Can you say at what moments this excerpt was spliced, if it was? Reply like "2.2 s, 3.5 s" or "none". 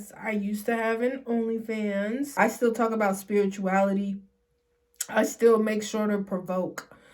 2.4 s